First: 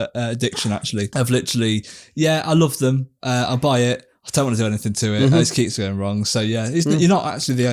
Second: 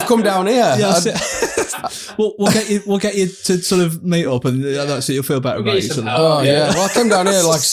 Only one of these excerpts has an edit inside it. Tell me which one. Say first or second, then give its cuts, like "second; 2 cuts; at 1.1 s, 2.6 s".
first; 1 cut; at 1.1 s